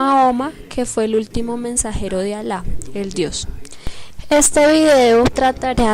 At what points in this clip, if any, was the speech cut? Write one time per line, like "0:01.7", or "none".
0:03.2